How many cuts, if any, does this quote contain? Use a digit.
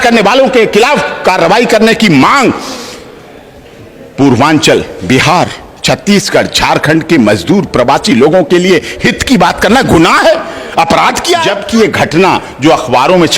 1